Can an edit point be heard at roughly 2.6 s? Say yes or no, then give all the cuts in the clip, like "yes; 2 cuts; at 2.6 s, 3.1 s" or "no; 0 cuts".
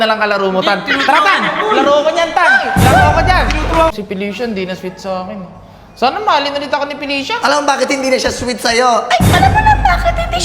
no; 1 cut; at 3.9 s